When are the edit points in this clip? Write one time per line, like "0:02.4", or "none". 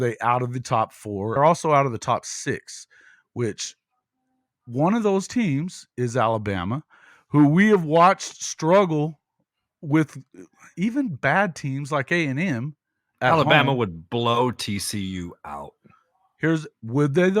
0:01.4